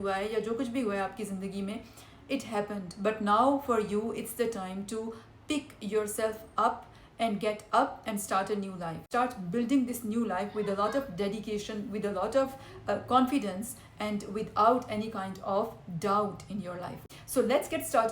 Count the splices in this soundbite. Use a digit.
2